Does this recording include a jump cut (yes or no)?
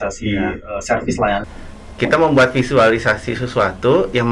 yes